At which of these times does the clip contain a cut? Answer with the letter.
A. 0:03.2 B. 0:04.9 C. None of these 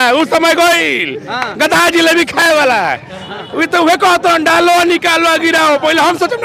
C